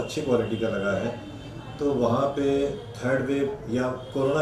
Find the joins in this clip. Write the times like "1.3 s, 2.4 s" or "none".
none